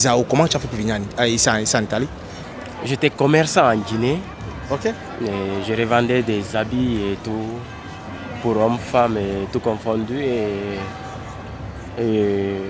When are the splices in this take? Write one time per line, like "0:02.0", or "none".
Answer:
0:02.2